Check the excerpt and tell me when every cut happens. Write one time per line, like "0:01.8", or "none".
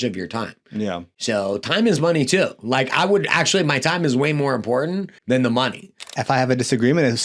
0:05.1
0:06.1